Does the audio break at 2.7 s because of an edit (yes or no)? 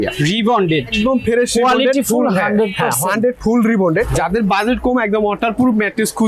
no